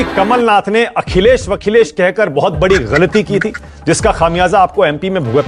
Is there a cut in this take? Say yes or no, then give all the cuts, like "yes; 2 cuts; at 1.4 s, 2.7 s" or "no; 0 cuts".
no; 0 cuts